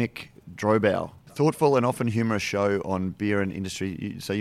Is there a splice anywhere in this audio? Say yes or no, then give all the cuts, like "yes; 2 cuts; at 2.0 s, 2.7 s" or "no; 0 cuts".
yes; 1 cut; at 1.2 s